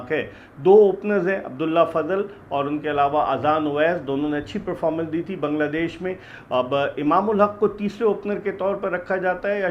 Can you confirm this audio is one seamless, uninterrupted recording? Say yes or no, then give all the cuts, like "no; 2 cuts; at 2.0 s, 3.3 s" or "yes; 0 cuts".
yes; 0 cuts